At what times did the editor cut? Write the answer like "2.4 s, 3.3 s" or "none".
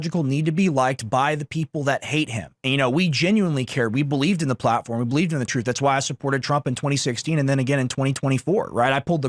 none